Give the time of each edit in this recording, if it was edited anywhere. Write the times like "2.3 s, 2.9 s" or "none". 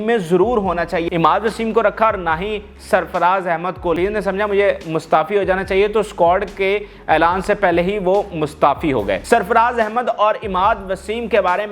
1.0 s, 4.0 s, 9.2 s